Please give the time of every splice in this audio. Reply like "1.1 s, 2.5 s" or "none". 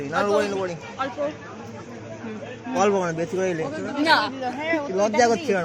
none